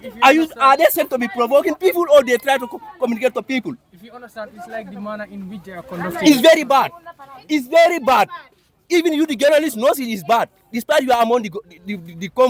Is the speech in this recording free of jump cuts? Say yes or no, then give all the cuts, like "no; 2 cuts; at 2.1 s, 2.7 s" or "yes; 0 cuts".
yes; 0 cuts